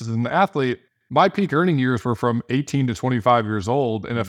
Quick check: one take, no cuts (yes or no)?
no